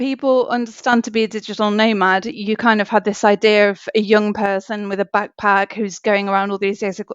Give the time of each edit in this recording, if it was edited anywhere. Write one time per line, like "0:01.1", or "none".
none